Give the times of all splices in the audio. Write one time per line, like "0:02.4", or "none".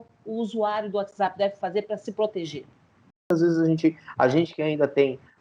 0:03.3